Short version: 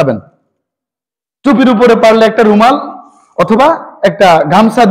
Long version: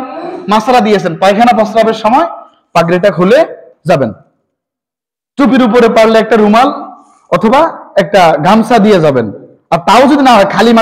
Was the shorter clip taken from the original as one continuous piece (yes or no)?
yes